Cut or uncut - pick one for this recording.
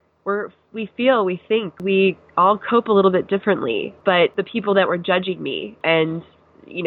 cut